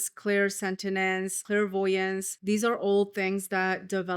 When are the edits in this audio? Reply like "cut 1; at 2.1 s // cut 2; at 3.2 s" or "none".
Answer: cut 1; at 1.4 s // cut 2; at 2.3 s